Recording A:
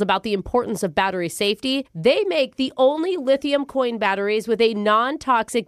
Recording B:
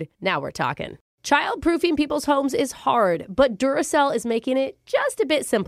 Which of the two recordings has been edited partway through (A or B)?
B